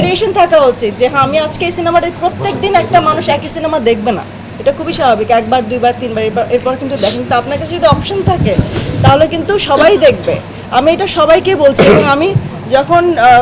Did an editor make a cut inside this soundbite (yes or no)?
no